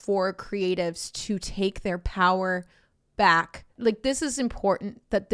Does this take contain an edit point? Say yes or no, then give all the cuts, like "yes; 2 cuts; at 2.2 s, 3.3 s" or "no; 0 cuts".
yes; 1 cut; at 3.7 s